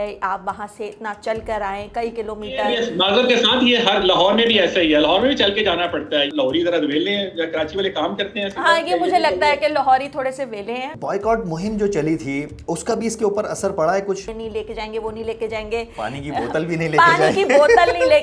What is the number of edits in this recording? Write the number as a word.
four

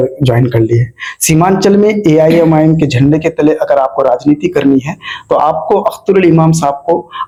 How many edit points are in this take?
zero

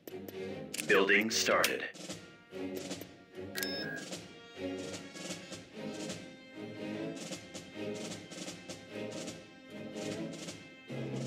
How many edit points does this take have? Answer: one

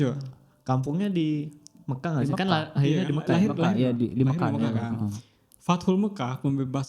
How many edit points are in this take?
zero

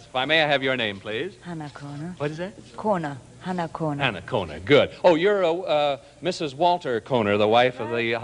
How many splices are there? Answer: one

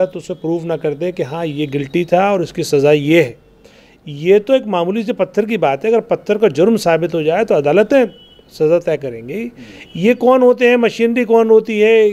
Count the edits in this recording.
zero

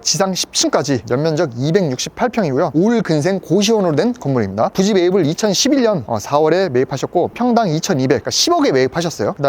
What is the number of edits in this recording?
zero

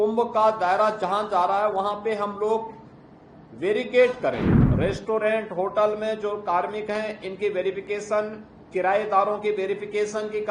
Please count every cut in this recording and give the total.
one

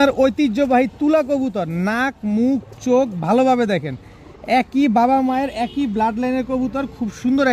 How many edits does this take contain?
zero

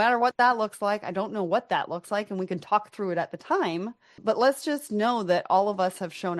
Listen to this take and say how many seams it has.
one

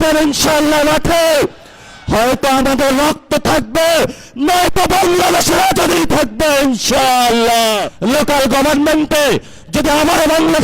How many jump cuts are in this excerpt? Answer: one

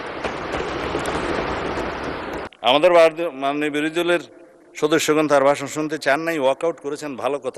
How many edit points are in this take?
one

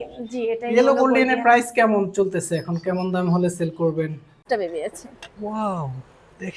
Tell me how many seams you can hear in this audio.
one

